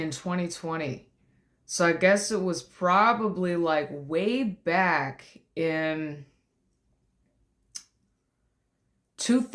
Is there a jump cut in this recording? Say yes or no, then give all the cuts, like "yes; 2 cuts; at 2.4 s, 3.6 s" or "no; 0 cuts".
no; 0 cuts